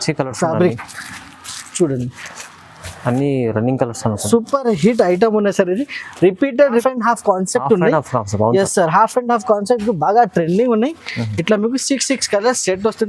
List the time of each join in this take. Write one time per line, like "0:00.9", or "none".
0:06.8

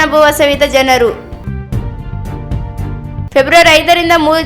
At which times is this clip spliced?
0:01.3
0:03.2

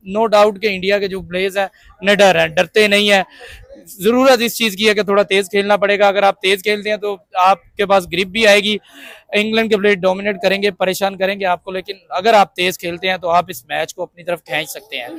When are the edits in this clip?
none

